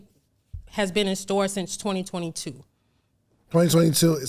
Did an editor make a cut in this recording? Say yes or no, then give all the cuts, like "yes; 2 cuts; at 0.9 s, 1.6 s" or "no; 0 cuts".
no; 0 cuts